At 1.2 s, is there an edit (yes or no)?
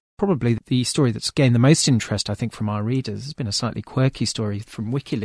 yes